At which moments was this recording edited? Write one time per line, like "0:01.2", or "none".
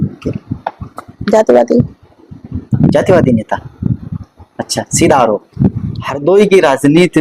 0:06.3